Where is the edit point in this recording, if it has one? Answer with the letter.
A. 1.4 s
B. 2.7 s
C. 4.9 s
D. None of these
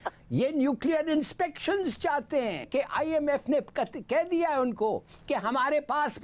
B